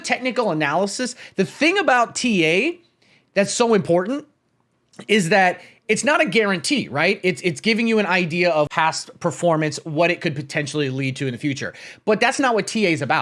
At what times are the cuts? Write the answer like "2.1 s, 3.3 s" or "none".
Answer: 8.7 s

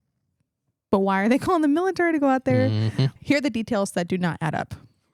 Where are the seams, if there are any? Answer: 3.1 s

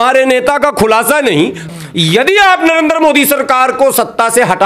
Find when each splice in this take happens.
1.6 s

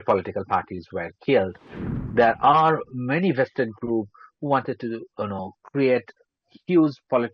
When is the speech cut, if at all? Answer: 1.8 s

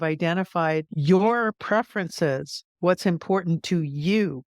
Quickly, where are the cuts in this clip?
0.9 s, 1.6 s

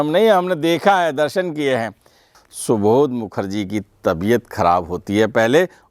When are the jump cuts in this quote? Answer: 2.4 s

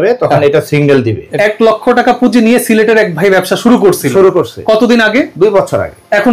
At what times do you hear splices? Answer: 1.3 s, 5.3 s

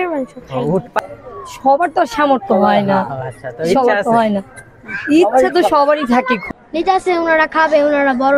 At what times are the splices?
1.0 s, 6.4 s

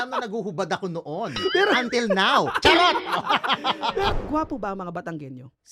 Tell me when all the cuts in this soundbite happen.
4.2 s

